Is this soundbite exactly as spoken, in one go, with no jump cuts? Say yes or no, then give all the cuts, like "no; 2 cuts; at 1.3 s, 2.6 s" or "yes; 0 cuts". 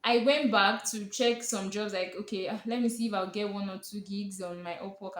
yes; 0 cuts